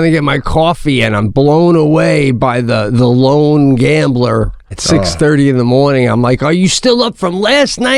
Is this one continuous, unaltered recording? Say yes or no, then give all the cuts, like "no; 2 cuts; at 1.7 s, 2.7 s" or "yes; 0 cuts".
no; 1 cut; at 4.7 s